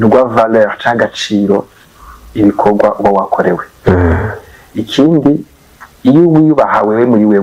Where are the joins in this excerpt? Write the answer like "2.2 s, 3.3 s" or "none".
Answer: none